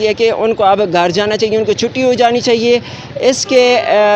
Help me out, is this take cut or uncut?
uncut